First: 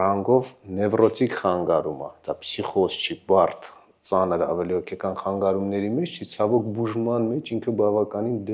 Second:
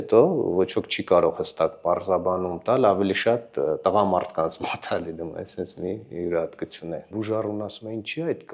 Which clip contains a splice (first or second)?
second